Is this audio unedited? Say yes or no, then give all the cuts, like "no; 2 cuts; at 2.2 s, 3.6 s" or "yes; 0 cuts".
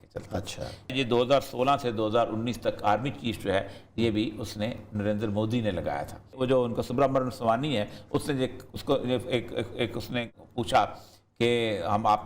no; 2 cuts; at 0.9 s, 6.3 s